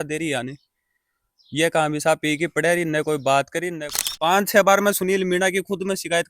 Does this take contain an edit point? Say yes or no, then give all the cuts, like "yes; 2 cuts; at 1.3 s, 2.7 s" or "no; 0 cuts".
yes; 1 cut; at 3.8 s